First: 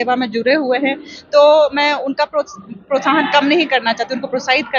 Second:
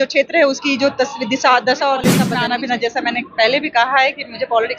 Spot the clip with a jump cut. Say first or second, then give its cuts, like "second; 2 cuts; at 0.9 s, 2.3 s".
second; 1 cut; at 2.2 s